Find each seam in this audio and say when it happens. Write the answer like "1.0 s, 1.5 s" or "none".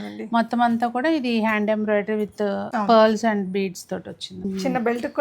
2.7 s, 4.3 s